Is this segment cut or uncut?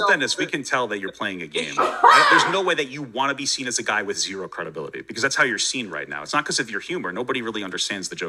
uncut